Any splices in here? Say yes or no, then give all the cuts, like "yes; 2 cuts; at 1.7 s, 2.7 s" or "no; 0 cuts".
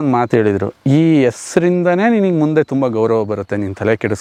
no; 0 cuts